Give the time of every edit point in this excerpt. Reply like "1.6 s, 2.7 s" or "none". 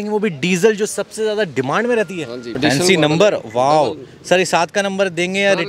2.4 s